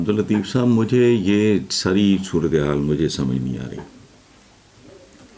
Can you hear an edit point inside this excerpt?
no; 0 cuts

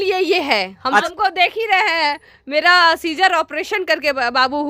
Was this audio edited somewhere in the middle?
yes; 1 cut; at 1.0 s

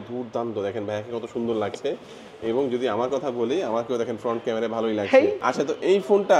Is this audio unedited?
no; 1 cut; at 5.4 s

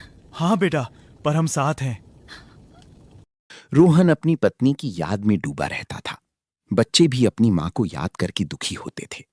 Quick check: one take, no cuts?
yes; 0 cuts

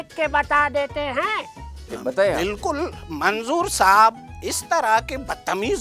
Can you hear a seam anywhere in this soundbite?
yes; 1 cut; at 1.9 s

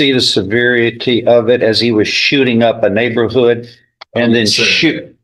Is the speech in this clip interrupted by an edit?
no; 0 cuts

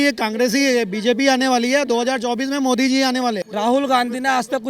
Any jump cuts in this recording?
yes; 1 cut; at 3.5 s

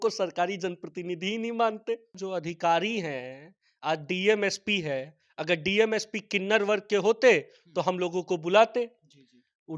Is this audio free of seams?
no; 1 cut; at 2.1 s

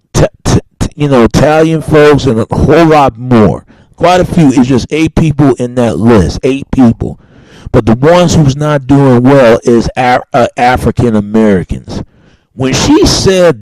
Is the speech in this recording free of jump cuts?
no; 1 cut; at 5.4 s

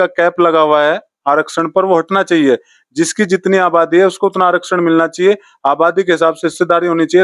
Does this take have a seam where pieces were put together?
no; 0 cuts

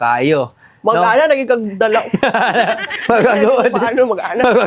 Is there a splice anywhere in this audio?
no; 0 cuts

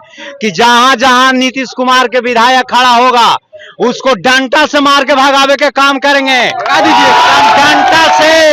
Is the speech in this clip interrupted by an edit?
no; 0 cuts

